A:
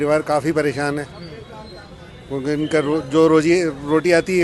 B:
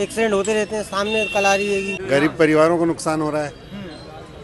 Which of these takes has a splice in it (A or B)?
B